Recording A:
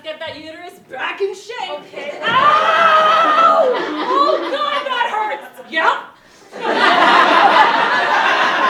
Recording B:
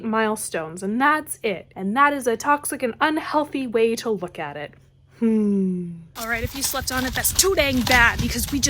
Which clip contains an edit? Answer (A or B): B